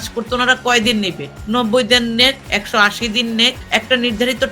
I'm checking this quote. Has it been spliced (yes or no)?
yes